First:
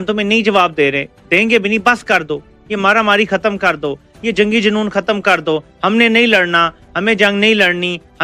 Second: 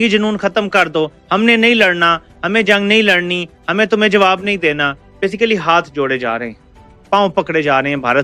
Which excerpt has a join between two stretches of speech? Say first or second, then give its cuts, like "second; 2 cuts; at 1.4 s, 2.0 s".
second; 1 cut; at 5.0 s